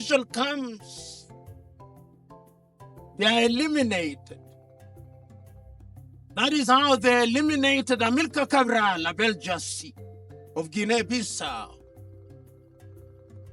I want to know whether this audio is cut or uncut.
cut